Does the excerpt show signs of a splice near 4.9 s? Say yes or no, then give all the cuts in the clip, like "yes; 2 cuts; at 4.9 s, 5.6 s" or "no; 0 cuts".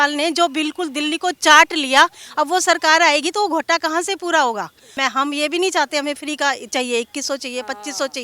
yes; 1 cut; at 4.9 s